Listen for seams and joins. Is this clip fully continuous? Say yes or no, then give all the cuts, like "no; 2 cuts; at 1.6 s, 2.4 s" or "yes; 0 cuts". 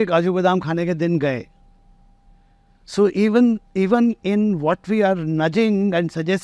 yes; 0 cuts